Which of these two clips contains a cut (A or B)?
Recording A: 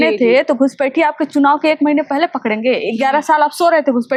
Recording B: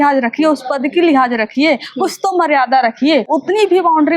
B